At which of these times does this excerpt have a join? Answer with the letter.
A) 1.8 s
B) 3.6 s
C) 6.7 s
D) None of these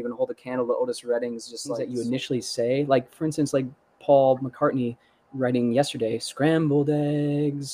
A